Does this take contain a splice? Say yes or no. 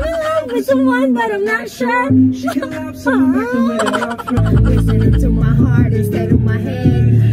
yes